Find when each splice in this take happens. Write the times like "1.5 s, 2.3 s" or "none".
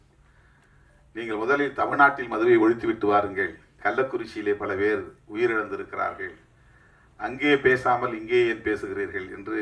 none